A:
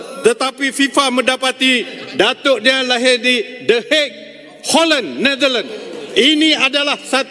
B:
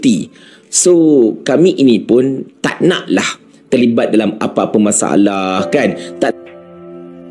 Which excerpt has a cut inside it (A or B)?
B